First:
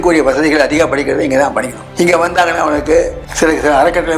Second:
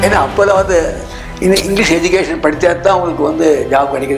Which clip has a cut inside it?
first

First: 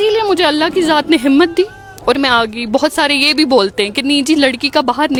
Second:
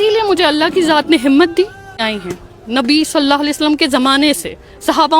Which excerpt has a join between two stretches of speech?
second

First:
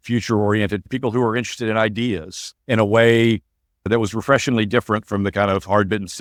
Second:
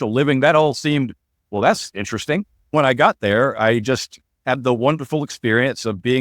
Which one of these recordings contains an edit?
second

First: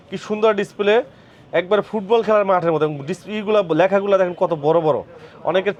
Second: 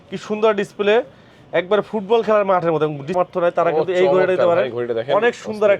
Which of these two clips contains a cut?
second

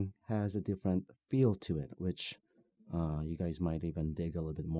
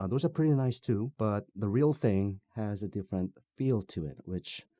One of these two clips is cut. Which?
second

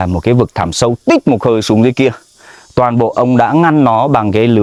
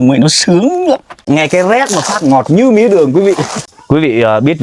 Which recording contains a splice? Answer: second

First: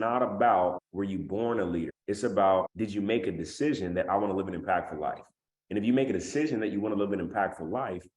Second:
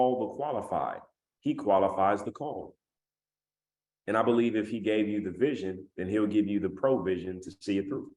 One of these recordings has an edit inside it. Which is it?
first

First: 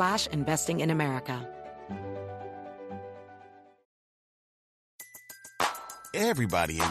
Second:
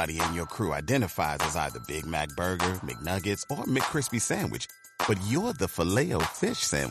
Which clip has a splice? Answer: first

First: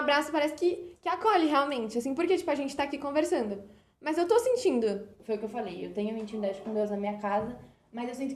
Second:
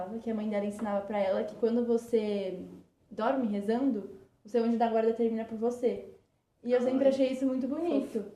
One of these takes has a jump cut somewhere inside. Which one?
first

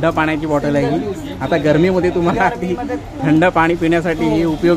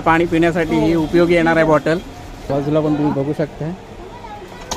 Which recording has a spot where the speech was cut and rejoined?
second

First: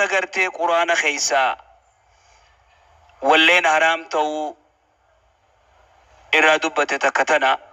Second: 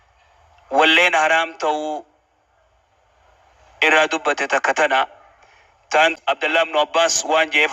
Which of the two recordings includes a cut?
second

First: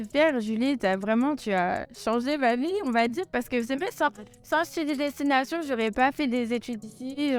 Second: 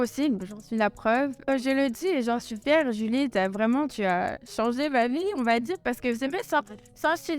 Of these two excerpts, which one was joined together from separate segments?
second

